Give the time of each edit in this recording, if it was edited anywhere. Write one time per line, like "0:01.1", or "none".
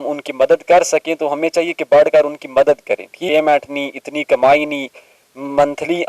0:03.1